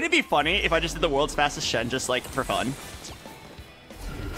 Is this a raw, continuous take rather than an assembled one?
yes; 0 cuts

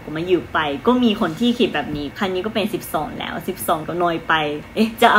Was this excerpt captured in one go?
no; 2 cuts; at 2.1 s, 4.3 s

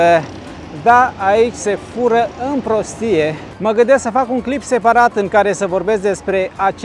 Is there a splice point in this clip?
no; 0 cuts

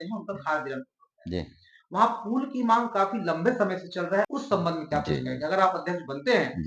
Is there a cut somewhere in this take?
yes; 1 cut; at 4.3 s

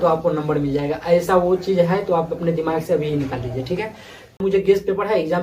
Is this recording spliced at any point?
yes; 1 cut; at 4.4 s

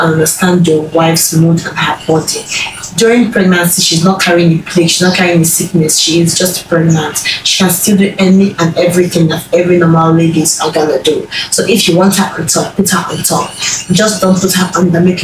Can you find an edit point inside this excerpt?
no; 0 cuts

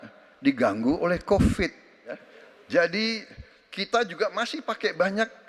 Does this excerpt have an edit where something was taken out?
yes; 1 cut; at 2.2 s

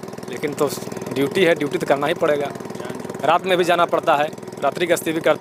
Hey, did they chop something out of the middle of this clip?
no; 0 cuts

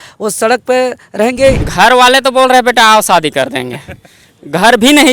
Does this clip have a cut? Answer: yes; 1 cut; at 1.7 s

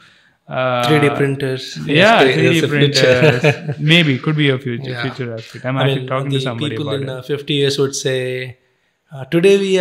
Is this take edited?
no; 0 cuts

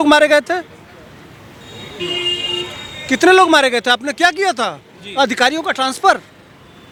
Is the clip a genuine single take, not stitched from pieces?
yes; 0 cuts

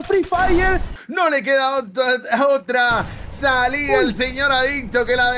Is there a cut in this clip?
yes; 1 cut; at 1.0 s

